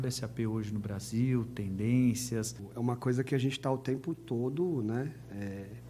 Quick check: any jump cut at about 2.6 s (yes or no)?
yes